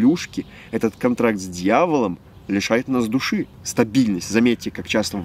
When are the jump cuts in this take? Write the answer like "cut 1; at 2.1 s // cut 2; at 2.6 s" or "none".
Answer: cut 1; at 3.6 s